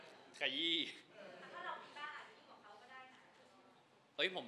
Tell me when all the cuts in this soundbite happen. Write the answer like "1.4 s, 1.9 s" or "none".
none

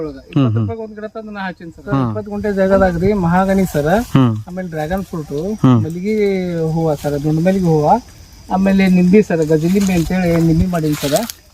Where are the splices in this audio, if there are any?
2.3 s

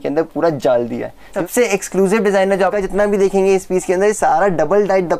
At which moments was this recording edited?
1.4 s, 2.7 s

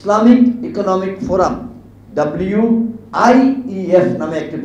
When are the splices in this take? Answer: none

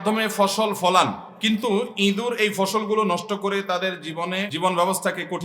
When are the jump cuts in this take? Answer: 1.3 s, 4.5 s

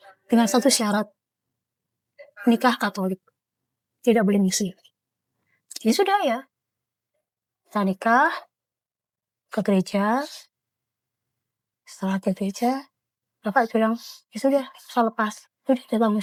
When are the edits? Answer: none

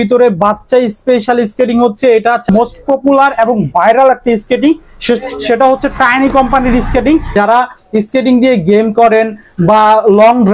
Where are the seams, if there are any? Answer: 2.5 s, 7.3 s

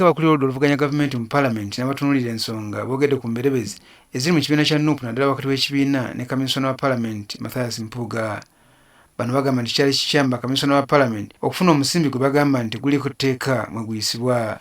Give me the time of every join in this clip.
8.4 s

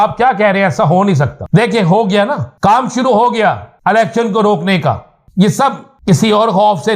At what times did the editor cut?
1.4 s, 2.5 s, 3.7 s, 5.1 s, 5.9 s

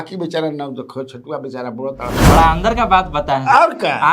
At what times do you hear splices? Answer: 2.2 s

